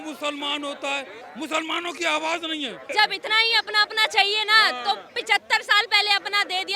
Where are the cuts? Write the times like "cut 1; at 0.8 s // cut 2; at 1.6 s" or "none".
cut 1; at 1.2 s // cut 2; at 2.9 s